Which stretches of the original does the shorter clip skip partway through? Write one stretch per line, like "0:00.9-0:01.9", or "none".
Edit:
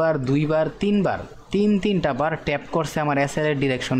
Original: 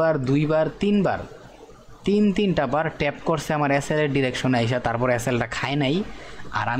0:01.3-0:01.9